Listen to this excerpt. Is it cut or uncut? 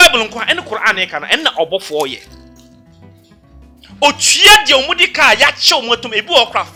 uncut